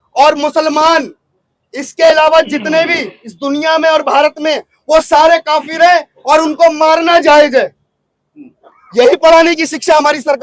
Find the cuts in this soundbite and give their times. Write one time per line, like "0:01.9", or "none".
none